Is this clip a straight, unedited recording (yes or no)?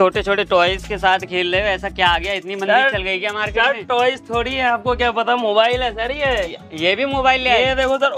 yes